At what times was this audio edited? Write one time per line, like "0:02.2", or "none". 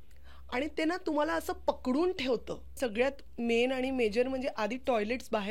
0:02.8